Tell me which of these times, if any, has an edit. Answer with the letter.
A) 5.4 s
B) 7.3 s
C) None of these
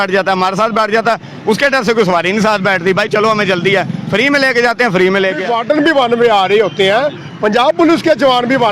A